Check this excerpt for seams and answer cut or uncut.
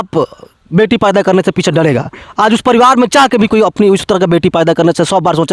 uncut